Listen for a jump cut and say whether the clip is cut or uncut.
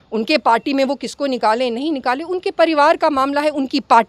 uncut